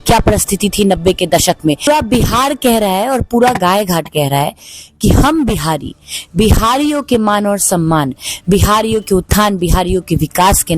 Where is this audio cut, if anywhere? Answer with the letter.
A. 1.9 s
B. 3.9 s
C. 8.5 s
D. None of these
A